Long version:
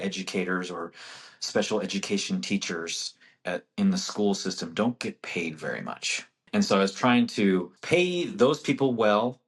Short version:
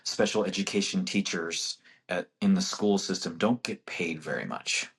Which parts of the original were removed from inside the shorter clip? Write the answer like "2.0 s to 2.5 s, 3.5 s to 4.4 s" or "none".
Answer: none